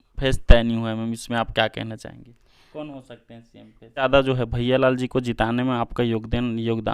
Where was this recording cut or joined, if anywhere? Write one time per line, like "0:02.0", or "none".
0:04.0